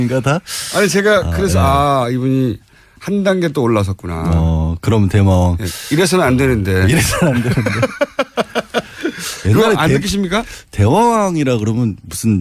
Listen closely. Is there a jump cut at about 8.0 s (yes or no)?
yes